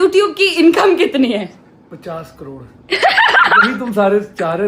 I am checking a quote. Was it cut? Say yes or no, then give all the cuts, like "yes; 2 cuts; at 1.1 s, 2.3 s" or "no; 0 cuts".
no; 0 cuts